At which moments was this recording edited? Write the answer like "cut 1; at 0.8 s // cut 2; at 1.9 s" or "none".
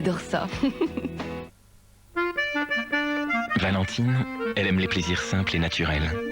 cut 1; at 2.1 s